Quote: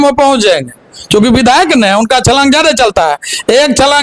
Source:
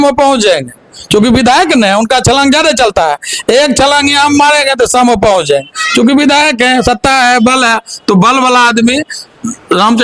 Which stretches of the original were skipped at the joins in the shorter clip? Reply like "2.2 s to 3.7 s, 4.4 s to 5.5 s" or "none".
none